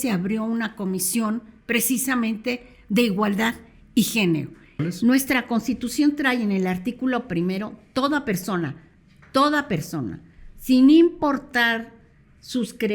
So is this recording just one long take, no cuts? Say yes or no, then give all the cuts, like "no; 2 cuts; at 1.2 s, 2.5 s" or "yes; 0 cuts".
no; 1 cut; at 4.8 s